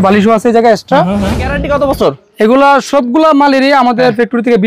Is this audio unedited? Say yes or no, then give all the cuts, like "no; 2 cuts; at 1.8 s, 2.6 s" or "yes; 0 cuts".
no; 1 cut; at 1.3 s